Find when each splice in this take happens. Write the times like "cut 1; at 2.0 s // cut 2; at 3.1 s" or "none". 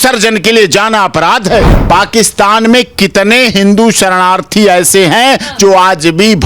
cut 1; at 1.8 s